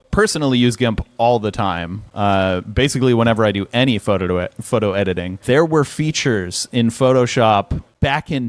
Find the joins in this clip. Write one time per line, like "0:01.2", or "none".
0:05.4